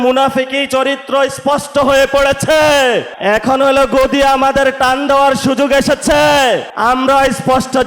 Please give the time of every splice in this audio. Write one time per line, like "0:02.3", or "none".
0:03.1
0:06.7